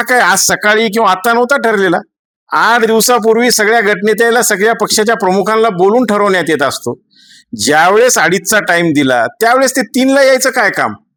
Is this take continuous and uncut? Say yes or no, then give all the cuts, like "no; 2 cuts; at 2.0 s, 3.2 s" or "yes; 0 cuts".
yes; 0 cuts